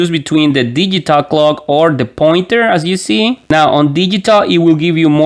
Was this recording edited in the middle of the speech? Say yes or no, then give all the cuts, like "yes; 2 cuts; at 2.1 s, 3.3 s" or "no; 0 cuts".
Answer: yes; 1 cut; at 3.4 s